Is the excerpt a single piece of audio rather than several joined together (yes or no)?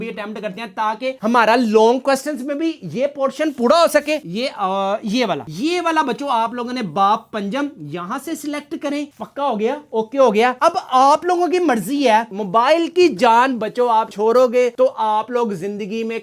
no